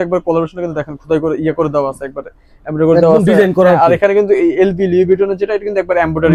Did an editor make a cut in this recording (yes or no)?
no